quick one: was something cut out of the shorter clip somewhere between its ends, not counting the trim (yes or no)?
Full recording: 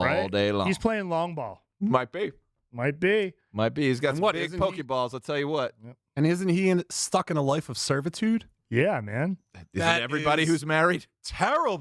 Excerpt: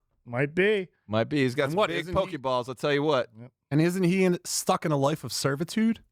no